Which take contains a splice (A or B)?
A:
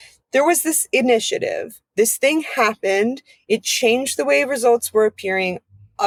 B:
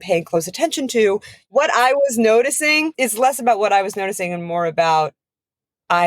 B